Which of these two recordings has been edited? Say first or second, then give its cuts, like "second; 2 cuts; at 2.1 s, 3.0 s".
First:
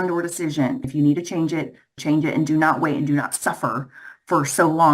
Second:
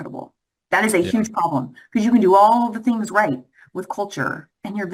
first; 2 cuts; at 0.9 s, 1.9 s